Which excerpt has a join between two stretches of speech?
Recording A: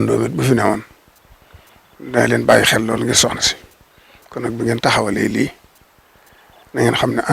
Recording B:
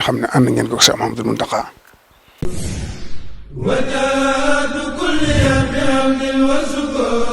B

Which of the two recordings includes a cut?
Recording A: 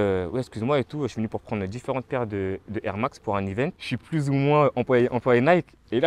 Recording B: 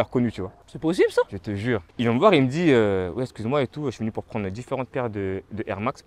B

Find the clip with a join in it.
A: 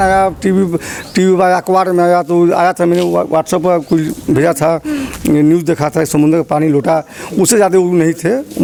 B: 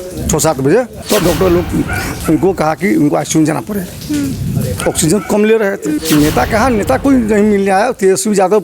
B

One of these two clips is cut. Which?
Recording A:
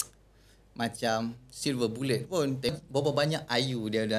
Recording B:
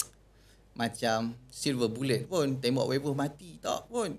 A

